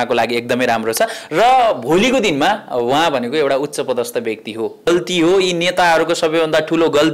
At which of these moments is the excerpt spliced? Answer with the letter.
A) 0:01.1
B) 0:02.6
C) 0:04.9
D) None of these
C